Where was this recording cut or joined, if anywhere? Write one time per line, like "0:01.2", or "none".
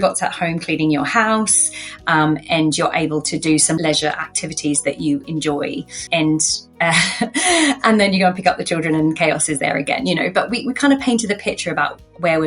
0:03.8
0:06.0